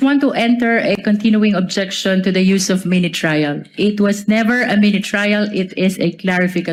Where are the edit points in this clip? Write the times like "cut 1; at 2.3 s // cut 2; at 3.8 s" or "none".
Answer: none

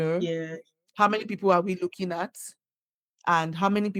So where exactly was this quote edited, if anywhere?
none

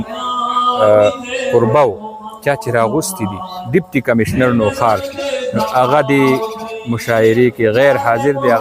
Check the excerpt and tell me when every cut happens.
none

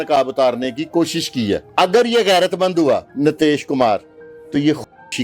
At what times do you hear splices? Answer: cut 1; at 1.7 s // cut 2; at 3.1 s

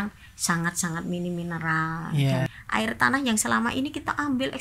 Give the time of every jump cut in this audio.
cut 1; at 2.6 s

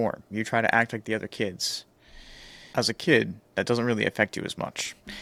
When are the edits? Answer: none

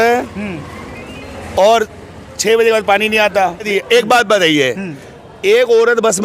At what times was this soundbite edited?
cut 1; at 3.7 s

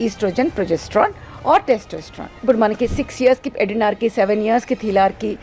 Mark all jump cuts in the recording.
cut 1; at 2.3 s

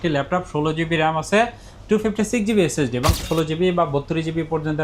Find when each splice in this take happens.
cut 1; at 3.2 s

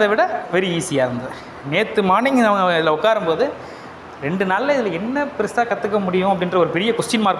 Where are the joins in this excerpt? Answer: cut 1; at 1.4 s

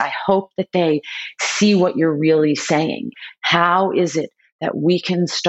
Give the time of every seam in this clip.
cut 1; at 3.2 s

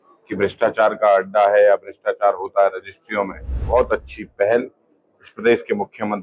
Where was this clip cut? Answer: cut 1; at 3.5 s

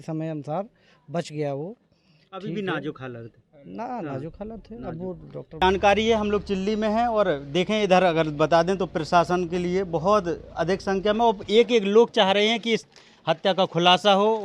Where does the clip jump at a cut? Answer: cut 1; at 5.6 s

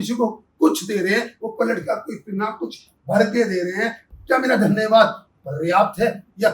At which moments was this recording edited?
cut 1; at 4.1 s

